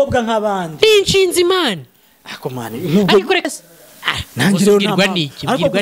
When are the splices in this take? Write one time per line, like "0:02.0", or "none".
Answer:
0:03.5

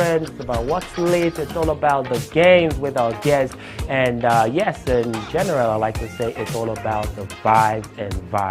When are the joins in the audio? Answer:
0:04.2

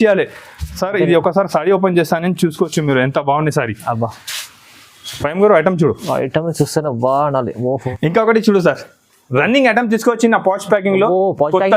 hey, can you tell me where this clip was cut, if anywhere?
0:07.9

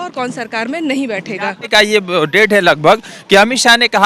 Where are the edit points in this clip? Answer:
0:01.7

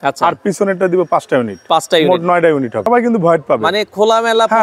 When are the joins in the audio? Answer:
0:02.8

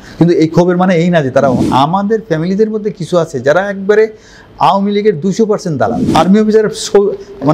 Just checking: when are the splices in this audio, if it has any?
0:01.6
0:06.0

